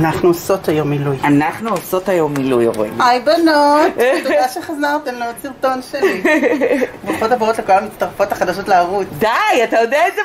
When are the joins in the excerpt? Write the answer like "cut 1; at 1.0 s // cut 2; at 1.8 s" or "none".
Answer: none